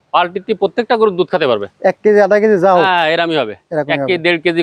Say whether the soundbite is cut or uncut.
uncut